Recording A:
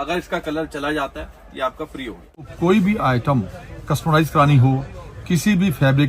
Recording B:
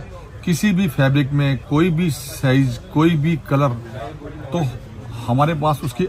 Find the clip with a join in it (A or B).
A